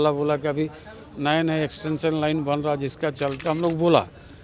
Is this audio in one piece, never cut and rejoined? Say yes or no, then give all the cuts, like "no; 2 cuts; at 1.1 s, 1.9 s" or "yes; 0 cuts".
no; 1 cut; at 3.4 s